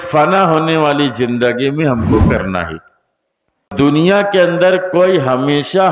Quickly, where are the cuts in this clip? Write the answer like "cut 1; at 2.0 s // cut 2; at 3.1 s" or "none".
cut 1; at 3.7 s